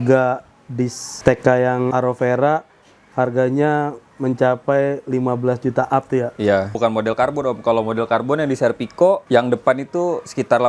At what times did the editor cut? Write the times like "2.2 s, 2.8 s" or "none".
6.7 s, 9.2 s